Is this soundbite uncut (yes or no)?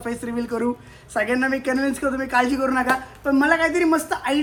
yes